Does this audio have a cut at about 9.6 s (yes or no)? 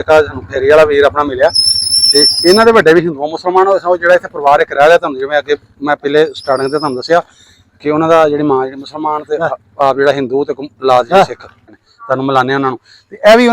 no